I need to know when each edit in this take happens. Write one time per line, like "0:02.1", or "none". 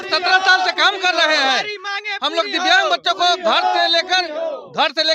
none